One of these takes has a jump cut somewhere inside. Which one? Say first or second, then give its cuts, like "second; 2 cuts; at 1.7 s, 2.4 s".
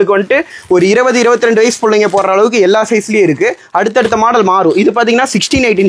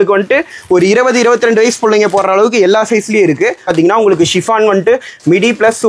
second; 1 cut; at 3.7 s